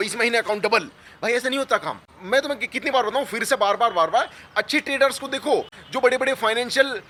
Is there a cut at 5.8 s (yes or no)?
no